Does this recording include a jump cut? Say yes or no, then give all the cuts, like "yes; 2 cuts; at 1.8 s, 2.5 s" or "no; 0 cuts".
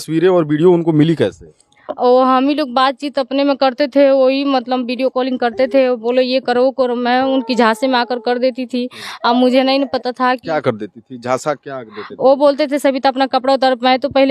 no; 0 cuts